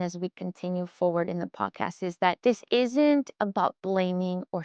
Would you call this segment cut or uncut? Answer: cut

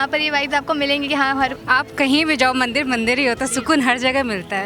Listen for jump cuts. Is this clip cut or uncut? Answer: cut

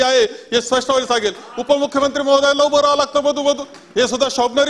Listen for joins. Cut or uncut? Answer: uncut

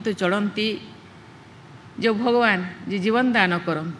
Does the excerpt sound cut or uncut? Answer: uncut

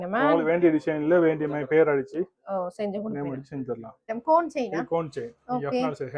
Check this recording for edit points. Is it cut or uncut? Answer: cut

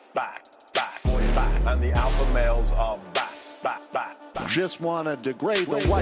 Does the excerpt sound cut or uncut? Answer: cut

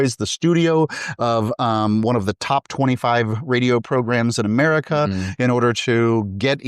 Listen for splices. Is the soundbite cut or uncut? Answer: uncut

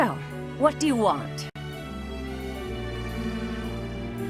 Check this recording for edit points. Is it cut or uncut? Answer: cut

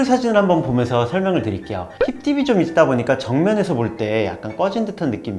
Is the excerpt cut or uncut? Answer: uncut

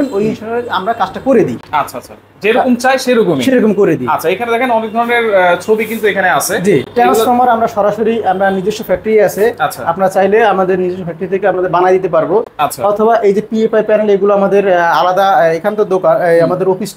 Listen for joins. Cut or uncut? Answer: uncut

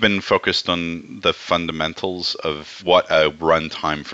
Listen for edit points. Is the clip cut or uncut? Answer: uncut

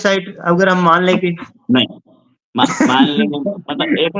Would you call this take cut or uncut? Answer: uncut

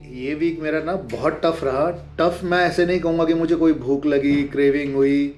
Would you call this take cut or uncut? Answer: uncut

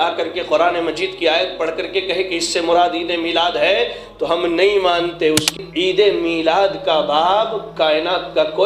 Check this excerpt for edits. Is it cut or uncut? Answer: cut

